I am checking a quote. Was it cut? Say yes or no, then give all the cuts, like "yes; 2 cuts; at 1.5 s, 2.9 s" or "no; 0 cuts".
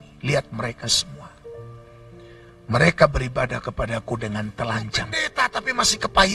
yes; 1 cut; at 5.2 s